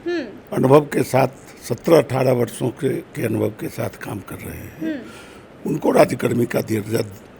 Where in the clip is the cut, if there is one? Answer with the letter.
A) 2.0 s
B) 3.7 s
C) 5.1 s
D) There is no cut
D